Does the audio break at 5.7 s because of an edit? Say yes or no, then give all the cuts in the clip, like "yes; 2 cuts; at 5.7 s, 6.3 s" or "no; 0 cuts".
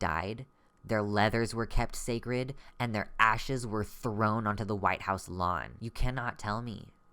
yes; 1 cut; at 5.7 s